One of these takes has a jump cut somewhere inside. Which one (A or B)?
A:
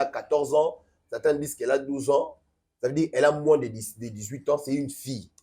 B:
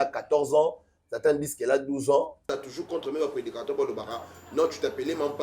B